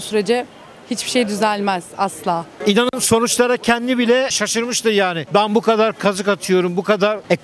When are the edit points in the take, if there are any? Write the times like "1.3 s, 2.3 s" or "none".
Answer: 2.6 s, 4.3 s